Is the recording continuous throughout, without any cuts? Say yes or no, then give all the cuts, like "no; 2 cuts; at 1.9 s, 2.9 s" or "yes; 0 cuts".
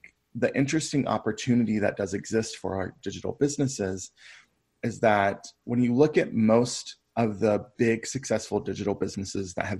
yes; 0 cuts